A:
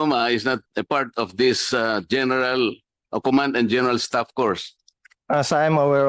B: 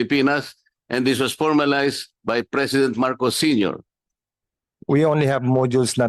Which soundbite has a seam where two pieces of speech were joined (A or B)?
B